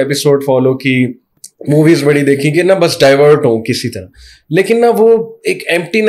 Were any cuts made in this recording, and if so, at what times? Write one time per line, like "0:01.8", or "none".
none